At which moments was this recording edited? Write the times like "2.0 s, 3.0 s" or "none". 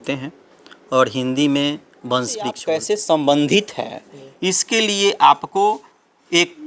2.6 s